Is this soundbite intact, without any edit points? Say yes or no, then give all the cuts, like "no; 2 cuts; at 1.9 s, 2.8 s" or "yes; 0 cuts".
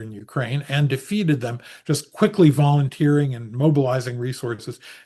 yes; 0 cuts